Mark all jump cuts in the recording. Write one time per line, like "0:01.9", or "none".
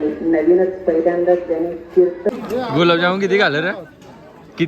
0:02.3